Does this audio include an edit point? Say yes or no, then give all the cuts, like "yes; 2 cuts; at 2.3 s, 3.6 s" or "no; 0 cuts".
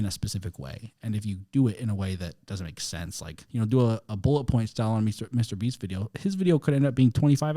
yes; 1 cut; at 3.4 s